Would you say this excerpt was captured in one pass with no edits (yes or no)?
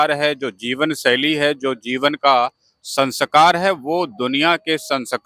yes